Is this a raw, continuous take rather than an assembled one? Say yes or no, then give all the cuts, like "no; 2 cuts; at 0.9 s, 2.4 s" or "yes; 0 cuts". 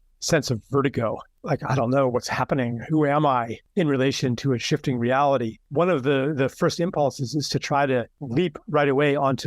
no; 4 cuts; at 1.3 s, 3.6 s, 5.6 s, 8.2 s